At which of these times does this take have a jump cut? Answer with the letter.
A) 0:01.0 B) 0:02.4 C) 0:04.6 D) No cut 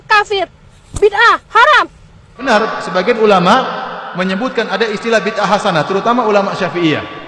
B